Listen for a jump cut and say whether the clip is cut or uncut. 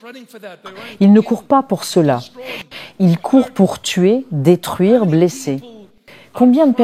uncut